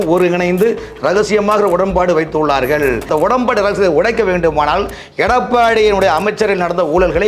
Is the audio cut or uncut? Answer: cut